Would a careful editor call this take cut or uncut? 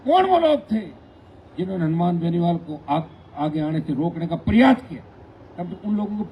uncut